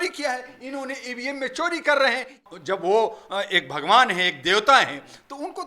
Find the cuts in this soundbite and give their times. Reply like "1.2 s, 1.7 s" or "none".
2.4 s